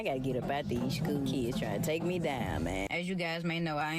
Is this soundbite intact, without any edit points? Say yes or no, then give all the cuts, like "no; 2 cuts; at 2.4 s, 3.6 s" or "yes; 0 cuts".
no; 1 cut; at 2.9 s